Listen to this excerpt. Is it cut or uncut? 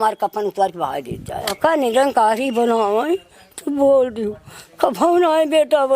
cut